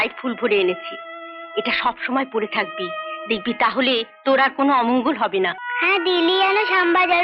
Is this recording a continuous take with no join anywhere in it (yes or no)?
no